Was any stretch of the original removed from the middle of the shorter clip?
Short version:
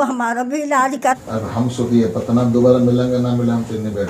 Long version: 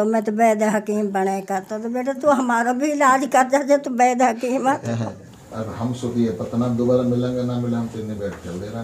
yes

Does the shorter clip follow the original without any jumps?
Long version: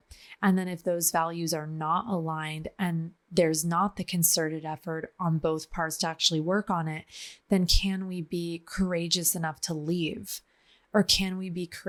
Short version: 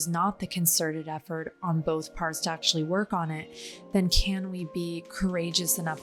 yes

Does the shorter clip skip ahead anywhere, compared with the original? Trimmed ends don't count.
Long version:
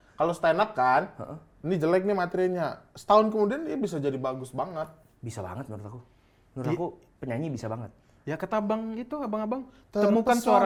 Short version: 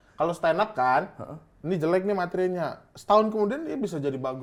no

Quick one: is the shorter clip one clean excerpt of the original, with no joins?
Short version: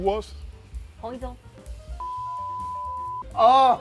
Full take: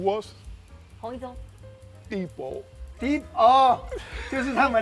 yes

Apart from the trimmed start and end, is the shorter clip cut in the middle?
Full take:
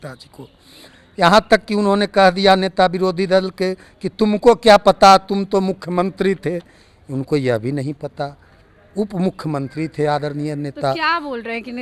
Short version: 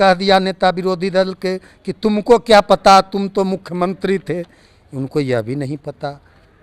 no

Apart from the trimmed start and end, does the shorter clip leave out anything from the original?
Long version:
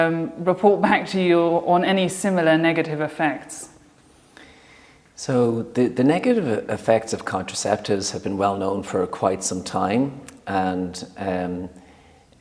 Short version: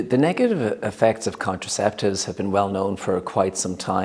no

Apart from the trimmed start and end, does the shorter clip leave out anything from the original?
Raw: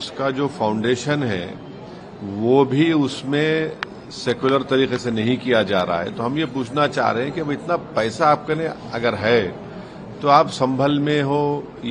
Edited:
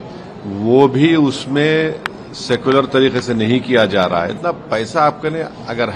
yes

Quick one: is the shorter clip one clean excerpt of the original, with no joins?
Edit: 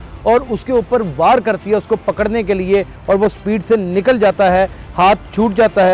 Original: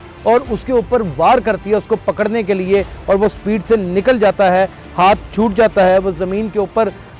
yes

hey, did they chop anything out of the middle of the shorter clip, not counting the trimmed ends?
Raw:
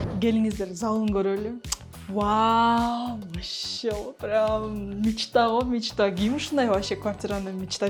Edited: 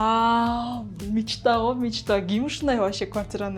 yes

